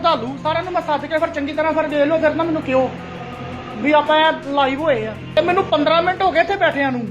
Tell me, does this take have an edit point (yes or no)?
yes